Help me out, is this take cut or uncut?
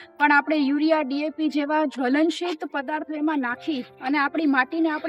uncut